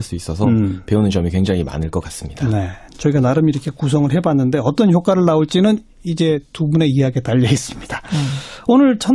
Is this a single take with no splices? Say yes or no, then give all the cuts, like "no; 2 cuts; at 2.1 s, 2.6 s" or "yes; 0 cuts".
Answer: no; 1 cut; at 7.4 s